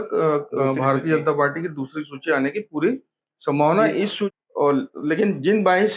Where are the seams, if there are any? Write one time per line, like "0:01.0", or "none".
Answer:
0:04.2